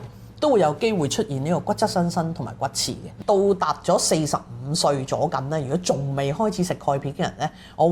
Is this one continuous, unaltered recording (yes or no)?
no